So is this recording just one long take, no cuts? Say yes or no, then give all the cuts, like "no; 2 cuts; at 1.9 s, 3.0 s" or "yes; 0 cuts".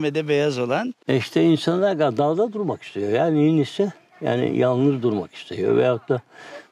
no; 1 cut; at 0.9 s